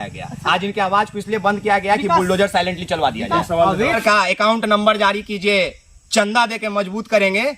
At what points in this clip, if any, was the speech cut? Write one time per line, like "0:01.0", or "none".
0:04.0